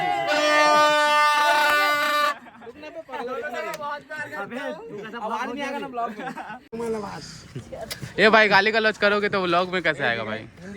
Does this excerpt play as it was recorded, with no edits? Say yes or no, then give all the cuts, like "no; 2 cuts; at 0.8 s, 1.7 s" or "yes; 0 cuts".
no; 2 cuts; at 1.0 s, 6.7 s